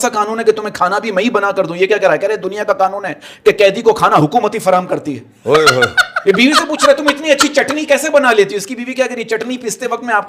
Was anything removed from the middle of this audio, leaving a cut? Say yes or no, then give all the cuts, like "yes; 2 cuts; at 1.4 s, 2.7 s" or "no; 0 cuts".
no; 0 cuts